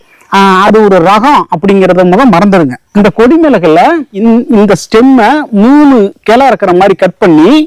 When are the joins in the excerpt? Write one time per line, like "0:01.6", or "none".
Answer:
0:02.8
0:04.1